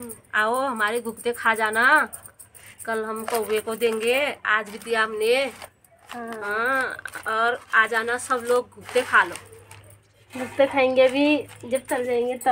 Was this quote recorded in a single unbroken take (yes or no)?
yes